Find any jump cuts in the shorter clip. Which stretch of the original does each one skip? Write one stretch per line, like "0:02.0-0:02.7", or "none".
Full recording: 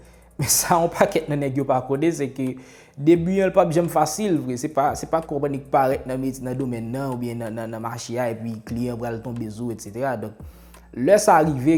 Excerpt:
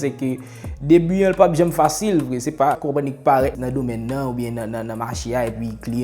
0:05.0-0:05.3
0:06.0-0:06.4